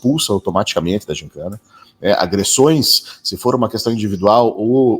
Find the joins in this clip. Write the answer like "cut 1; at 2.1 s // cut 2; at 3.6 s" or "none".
none